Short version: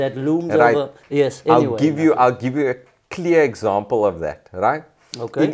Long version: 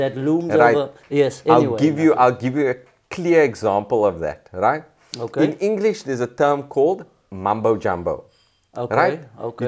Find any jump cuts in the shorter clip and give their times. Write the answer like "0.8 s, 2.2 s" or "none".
none